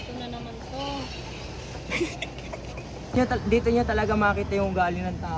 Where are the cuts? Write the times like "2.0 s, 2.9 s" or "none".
3.1 s